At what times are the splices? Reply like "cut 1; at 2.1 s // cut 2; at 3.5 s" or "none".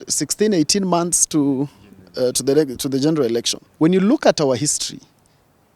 cut 1; at 3.6 s

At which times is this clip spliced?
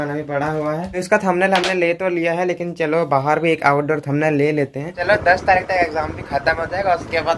cut 1; at 0.9 s // cut 2; at 5.0 s

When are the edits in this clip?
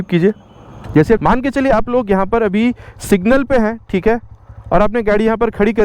cut 1; at 1.2 s

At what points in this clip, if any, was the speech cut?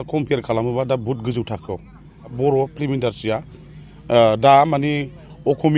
cut 1; at 2.3 s

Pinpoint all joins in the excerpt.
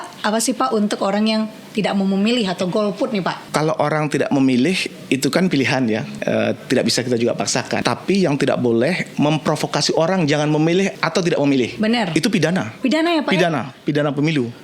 cut 1; at 3.4 s // cut 2; at 6.1 s // cut 3; at 7.8 s // cut 4; at 11.0 s // cut 5; at 12.7 s

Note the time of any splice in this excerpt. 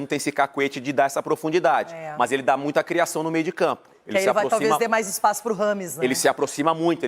none

